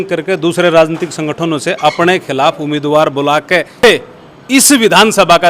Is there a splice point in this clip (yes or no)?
yes